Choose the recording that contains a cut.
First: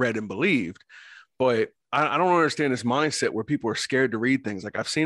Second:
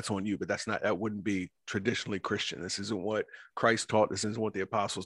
first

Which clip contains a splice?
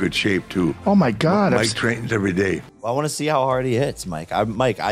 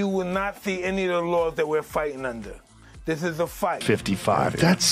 second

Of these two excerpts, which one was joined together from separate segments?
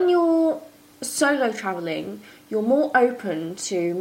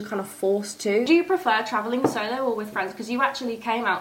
second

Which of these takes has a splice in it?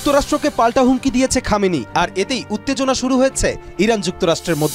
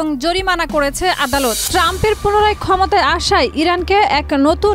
second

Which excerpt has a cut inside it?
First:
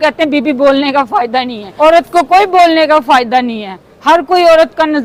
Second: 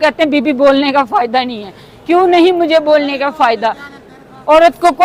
first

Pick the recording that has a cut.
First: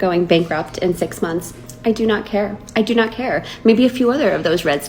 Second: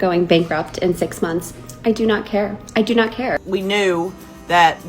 second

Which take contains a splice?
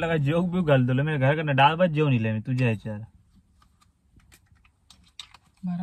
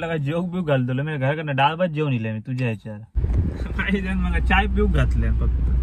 second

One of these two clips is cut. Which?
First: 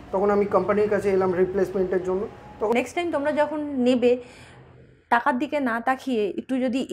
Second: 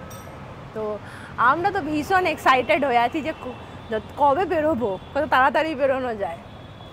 first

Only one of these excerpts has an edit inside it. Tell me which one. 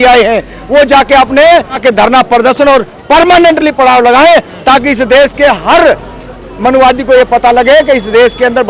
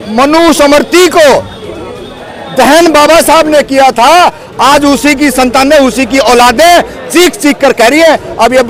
first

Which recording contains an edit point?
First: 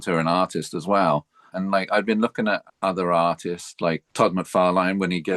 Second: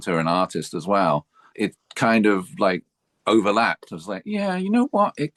first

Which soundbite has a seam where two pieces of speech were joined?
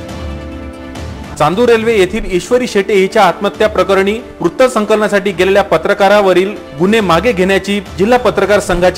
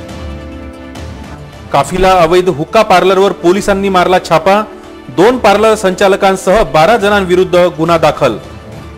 second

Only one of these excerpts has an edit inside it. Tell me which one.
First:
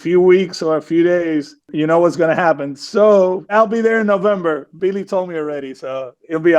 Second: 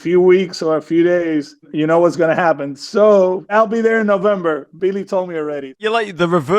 second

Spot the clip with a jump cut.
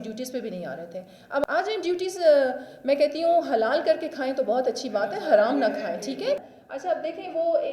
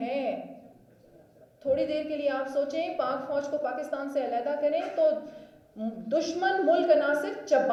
first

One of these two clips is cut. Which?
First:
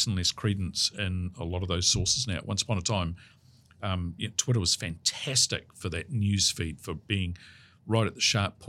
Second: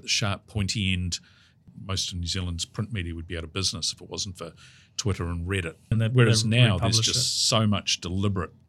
second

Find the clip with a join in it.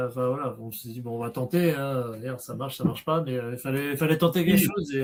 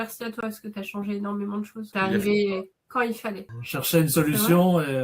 second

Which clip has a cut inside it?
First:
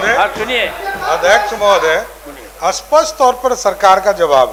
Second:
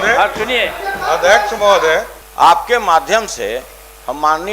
second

